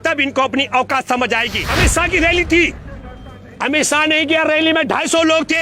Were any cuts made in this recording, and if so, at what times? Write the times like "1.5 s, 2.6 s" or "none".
1.6 s